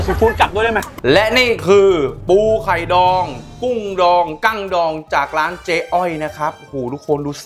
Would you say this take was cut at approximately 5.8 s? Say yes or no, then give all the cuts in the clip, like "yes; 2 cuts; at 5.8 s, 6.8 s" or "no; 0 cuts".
no; 1 cut; at 0.9 s